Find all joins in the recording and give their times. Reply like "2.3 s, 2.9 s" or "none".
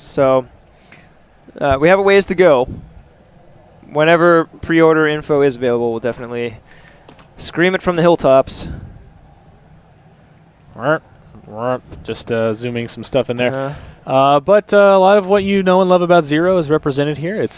none

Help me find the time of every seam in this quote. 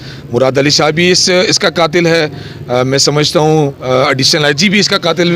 none

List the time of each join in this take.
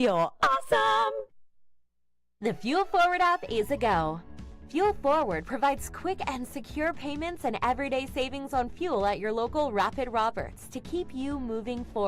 2.3 s

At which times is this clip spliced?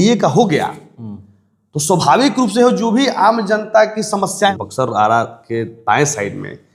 4.5 s

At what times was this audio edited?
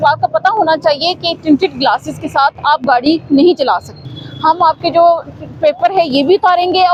none

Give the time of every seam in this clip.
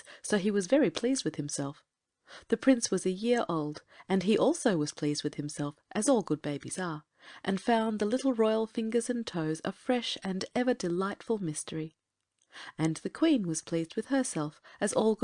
4.2 s

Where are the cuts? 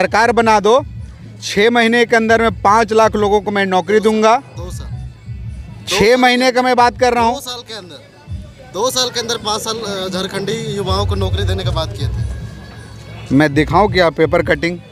none

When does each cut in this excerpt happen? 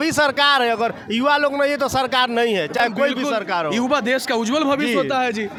none

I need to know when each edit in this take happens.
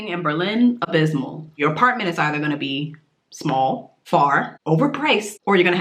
1.4 s, 4.9 s

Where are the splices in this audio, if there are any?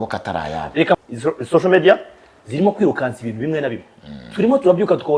1.0 s

